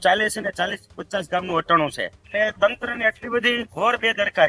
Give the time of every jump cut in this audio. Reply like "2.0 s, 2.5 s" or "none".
2.1 s